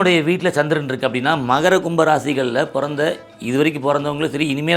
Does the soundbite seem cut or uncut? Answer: uncut